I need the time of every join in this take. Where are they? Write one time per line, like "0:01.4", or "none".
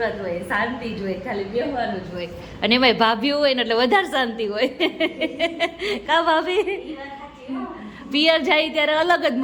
none